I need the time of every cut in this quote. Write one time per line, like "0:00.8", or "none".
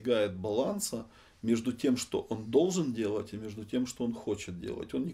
none